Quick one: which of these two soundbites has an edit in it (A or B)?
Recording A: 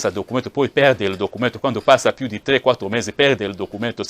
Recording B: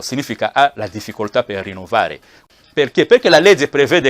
B